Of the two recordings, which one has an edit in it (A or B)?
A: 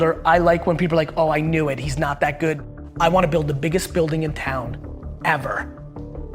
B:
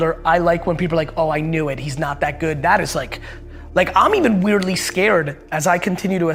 A